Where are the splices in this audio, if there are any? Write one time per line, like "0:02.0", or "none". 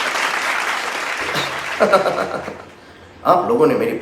0:01.2